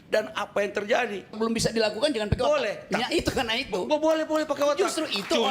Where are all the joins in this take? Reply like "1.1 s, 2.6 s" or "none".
1.4 s